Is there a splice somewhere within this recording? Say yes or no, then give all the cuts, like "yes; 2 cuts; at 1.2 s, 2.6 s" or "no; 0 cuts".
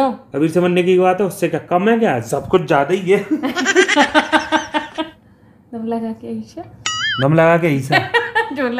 yes; 1 cut; at 4.9 s